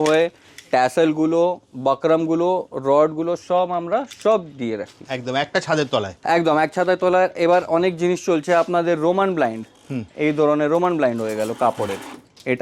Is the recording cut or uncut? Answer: uncut